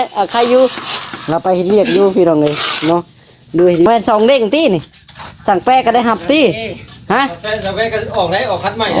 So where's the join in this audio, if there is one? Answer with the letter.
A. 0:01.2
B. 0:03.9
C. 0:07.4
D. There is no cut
B